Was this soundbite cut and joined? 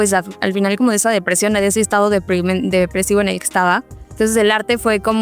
yes; 1 cut; at 4.1 s

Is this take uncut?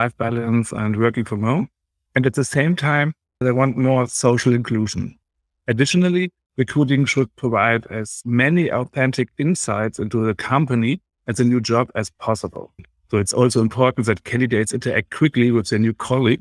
no; 2 cuts; at 5.2 s, 12.8 s

